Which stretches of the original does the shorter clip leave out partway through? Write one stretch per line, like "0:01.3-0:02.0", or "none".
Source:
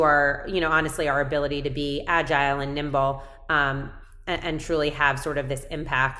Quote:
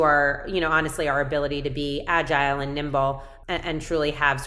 0:03.3-0:04.1